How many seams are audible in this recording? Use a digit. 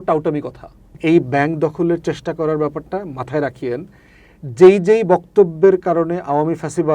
1